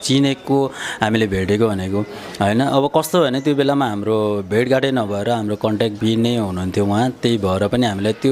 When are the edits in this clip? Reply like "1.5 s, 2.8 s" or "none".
none